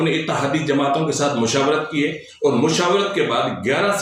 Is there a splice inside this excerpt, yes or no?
no